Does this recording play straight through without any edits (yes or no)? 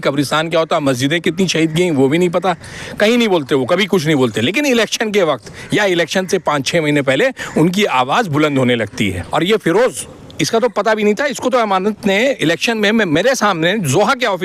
no